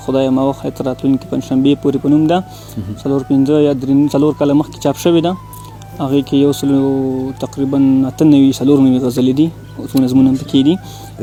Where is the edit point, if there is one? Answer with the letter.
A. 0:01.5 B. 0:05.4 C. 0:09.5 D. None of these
D